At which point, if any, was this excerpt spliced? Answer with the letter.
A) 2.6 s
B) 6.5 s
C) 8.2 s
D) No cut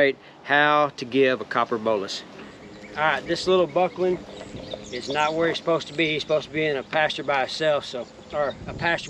A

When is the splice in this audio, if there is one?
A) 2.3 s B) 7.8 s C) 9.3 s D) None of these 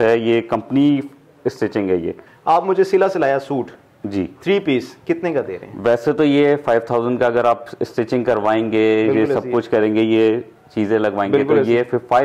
A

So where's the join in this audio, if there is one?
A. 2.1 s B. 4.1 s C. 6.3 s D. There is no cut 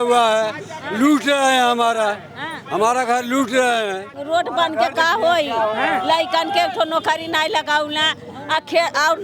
B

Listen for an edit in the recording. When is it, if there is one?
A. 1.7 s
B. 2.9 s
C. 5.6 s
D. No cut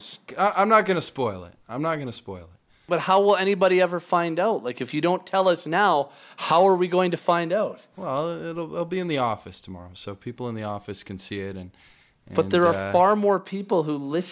B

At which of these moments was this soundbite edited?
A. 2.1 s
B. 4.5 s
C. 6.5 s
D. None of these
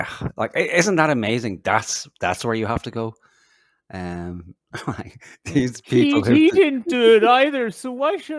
D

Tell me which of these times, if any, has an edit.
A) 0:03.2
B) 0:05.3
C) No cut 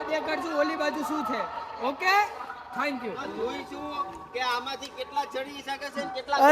A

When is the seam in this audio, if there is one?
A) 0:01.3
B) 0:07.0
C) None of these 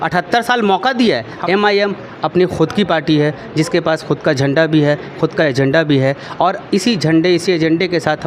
A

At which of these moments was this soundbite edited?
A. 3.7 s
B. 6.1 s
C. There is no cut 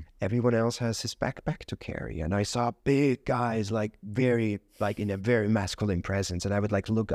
C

